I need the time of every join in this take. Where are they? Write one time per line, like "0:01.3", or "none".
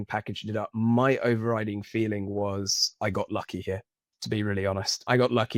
none